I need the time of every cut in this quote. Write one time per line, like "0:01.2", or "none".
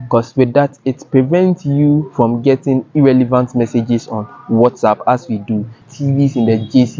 0:05.8